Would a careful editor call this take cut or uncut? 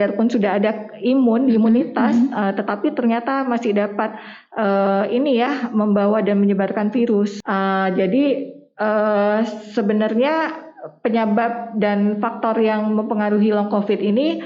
cut